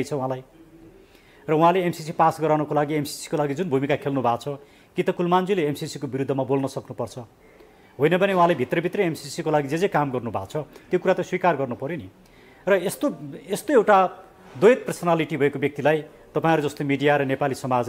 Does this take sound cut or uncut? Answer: uncut